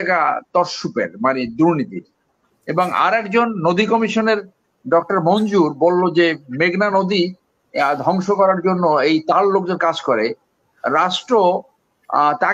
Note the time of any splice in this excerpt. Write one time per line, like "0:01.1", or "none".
none